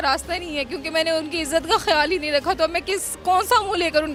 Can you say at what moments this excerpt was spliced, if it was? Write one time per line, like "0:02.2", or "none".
none